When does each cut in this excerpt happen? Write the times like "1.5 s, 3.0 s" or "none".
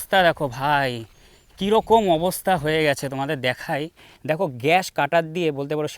4.1 s